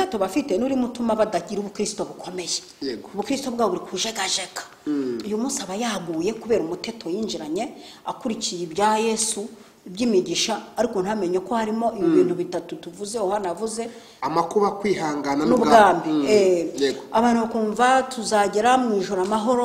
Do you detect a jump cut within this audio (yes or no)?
no